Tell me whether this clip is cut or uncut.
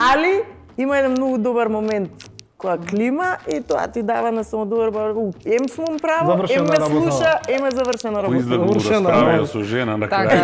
uncut